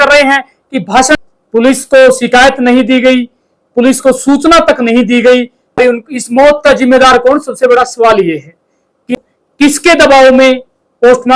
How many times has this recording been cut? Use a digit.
3